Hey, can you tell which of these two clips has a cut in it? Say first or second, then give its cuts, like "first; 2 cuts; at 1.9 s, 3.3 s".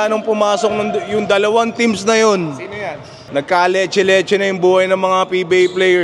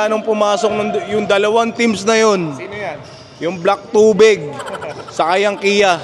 first; 1 cut; at 3.2 s